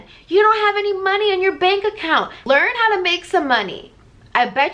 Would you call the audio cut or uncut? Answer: cut